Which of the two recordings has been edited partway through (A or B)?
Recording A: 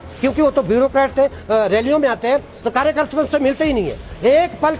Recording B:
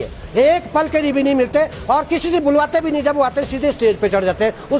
A